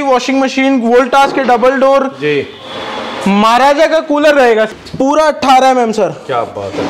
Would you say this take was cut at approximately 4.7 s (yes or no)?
yes